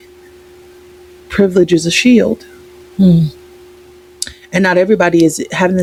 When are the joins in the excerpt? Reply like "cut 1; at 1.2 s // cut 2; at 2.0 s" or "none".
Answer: none